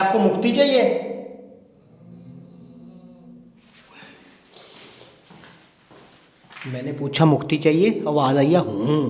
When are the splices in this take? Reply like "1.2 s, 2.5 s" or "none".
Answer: none